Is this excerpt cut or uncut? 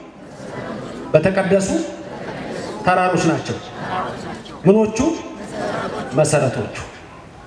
uncut